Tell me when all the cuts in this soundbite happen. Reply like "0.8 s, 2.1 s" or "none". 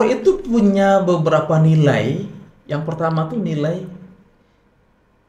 none

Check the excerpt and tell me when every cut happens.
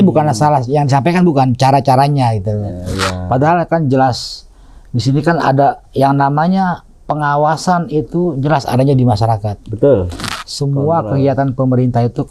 none

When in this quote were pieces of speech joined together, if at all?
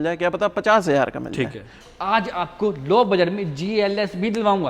1.8 s

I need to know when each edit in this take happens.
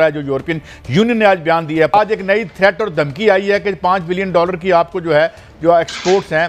1.9 s

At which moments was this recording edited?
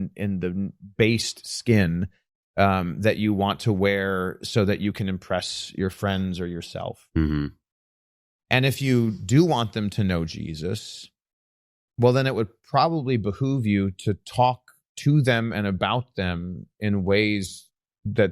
none

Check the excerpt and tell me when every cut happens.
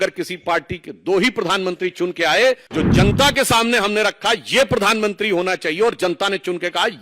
2.7 s

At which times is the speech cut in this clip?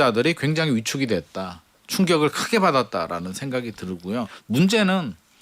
4.4 s

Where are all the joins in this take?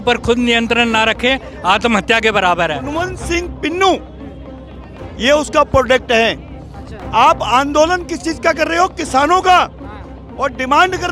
3.1 s

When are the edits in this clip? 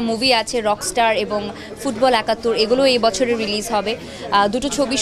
none

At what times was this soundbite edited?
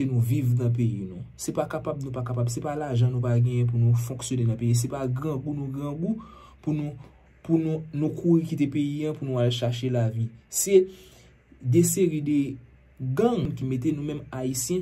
13.5 s

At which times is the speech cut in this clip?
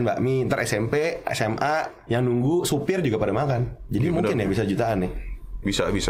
none

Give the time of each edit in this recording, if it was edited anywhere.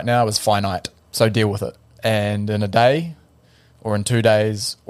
1.0 s, 1.8 s

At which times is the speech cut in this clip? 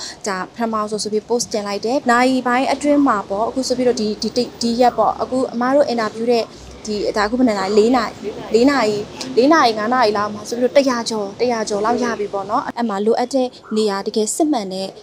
2.0 s, 12.7 s

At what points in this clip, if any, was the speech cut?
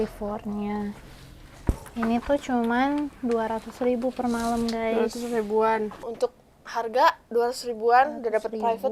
6.1 s

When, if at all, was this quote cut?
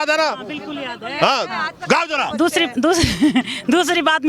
none

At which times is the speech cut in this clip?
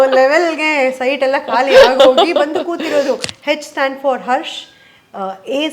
3.3 s

